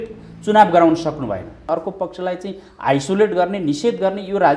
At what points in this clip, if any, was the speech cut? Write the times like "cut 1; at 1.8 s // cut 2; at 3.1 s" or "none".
cut 1; at 1.7 s

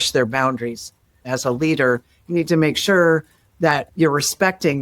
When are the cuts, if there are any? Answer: cut 1; at 1.3 s // cut 2; at 3.9 s

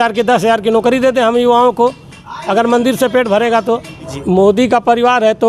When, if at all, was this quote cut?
cut 1; at 4.1 s

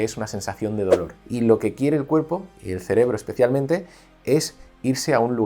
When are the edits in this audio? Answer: cut 1; at 1.2 s

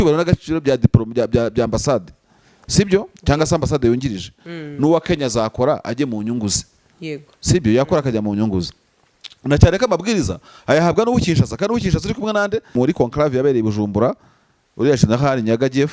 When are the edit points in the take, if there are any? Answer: cut 1; at 12.7 s

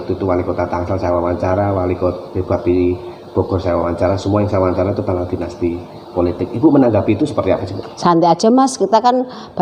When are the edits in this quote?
none

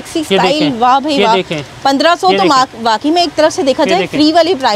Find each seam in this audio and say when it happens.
none

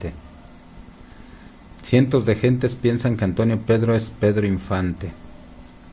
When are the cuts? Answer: cut 1; at 1.3 s

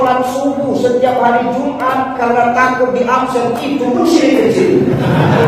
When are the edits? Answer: none

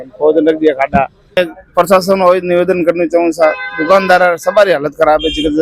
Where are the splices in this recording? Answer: cut 1; at 1.2 s

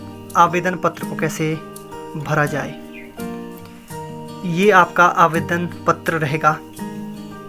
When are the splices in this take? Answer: cut 1; at 6.6 s

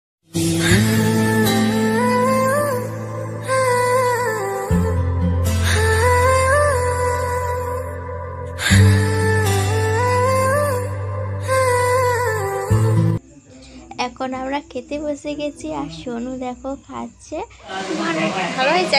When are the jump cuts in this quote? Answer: cut 1; at 17.8 s

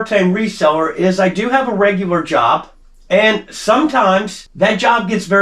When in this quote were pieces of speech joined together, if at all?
none

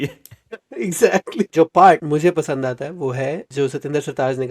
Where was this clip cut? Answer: cut 1; at 1.5 s // cut 2; at 2.0 s // cut 3; at 3.4 s

